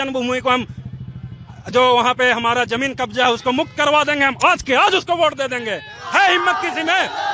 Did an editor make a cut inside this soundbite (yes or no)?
no